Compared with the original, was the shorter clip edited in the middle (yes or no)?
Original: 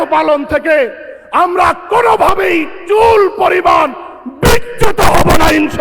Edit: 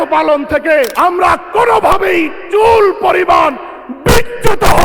yes